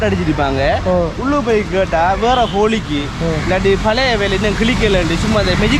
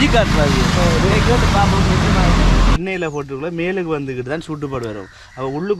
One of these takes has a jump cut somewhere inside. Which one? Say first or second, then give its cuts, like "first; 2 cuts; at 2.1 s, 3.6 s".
second; 1 cut; at 2.8 s